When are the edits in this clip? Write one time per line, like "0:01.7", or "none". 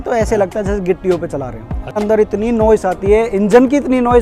0:02.0